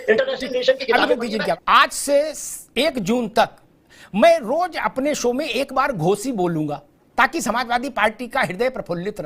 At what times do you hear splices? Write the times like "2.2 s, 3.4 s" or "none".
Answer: 1.6 s